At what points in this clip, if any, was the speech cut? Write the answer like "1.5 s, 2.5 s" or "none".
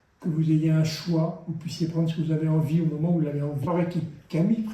3.7 s

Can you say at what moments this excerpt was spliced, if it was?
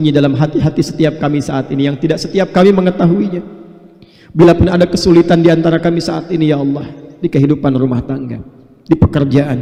none

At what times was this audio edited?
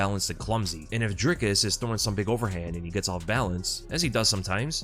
none

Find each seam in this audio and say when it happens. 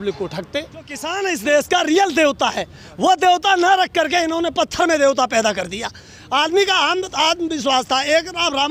1.1 s

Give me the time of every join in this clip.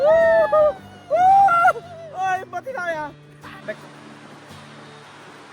3.6 s

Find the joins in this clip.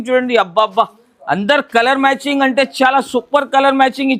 none

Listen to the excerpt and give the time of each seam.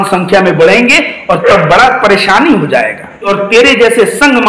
3.3 s

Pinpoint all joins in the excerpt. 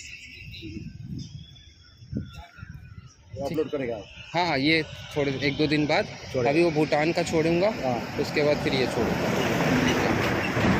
none

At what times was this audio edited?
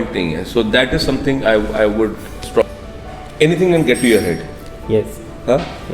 2.6 s

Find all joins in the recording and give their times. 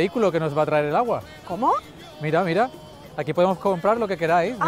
none

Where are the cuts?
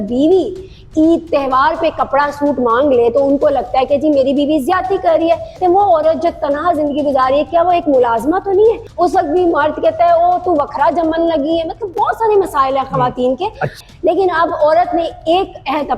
5.5 s, 8.9 s, 13.8 s

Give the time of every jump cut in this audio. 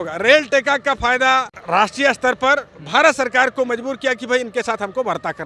none

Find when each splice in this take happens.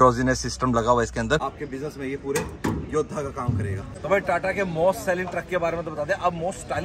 1.5 s, 3.9 s

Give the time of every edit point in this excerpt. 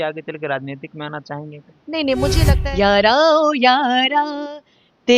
2.5 s

